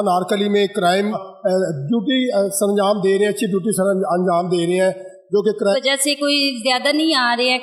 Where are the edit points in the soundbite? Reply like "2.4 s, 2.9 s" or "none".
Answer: 1.2 s, 5.7 s